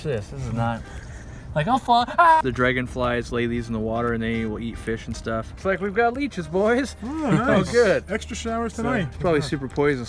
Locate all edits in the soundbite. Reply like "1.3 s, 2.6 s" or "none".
2.4 s, 5.5 s, 9.1 s